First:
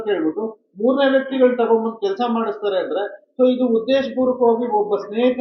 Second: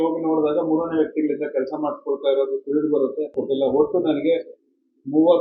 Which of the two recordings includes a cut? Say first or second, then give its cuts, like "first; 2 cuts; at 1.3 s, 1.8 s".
second; 1 cut; at 3.4 s